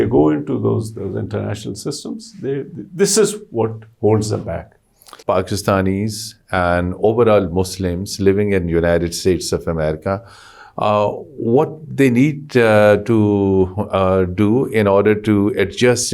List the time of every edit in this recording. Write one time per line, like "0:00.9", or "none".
0:05.0